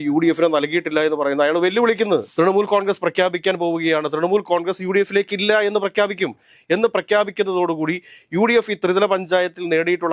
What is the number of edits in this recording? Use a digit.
1